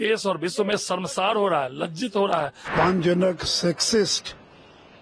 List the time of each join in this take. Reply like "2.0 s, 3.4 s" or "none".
2.6 s